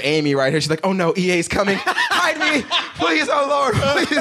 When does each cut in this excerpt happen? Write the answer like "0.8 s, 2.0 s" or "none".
none